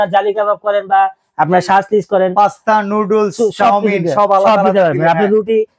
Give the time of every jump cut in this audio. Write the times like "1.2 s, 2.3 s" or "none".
none